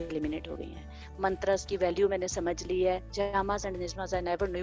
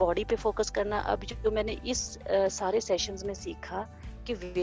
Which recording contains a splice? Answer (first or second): first